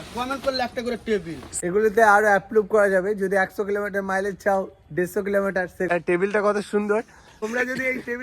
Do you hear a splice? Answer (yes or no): yes